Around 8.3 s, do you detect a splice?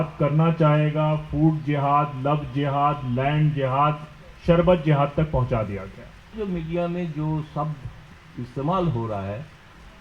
no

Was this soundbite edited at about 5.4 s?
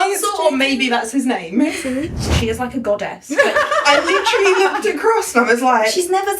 no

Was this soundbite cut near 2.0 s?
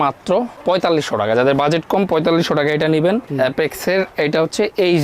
no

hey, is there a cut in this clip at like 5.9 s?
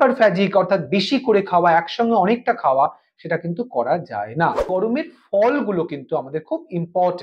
no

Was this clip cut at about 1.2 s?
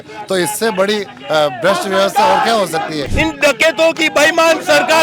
no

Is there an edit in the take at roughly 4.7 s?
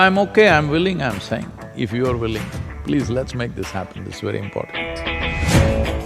yes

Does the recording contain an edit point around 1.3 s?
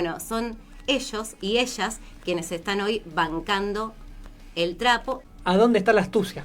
no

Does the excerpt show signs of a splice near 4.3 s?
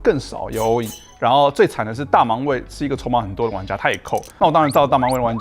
yes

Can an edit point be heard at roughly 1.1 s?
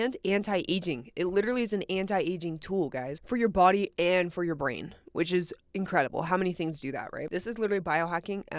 no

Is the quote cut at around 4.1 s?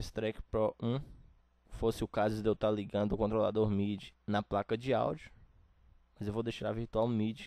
yes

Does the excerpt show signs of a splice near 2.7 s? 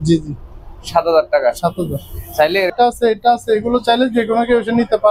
yes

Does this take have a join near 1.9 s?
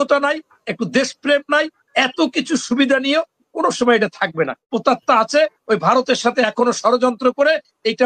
no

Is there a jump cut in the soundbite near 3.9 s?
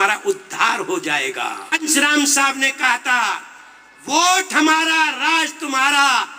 no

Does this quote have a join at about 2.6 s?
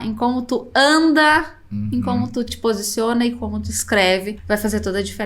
no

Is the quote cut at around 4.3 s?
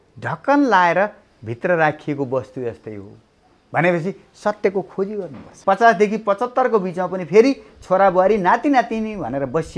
no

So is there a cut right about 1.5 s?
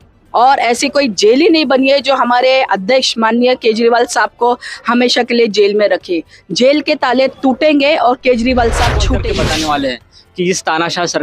no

